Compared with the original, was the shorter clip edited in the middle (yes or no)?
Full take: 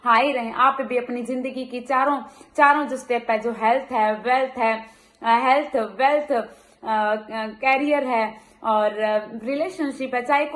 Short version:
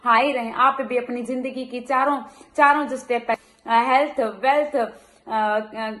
yes